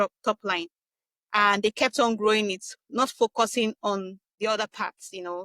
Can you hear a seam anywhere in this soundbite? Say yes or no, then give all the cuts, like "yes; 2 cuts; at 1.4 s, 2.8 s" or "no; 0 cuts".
yes; 1 cut; at 4.2 s